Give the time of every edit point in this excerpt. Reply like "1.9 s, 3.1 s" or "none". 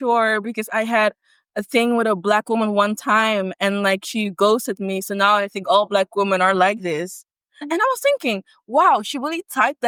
none